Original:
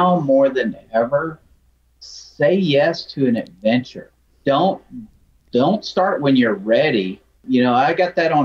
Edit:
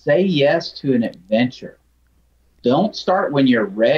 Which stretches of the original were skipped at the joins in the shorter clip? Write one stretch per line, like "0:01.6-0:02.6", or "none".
0:04.3-0:04.9